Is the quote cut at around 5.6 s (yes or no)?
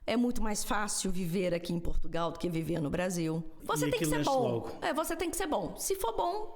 no